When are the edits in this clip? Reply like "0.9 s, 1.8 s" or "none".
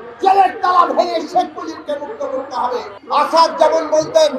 2.9 s